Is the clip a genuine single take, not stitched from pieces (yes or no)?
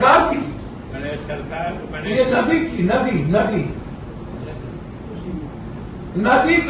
yes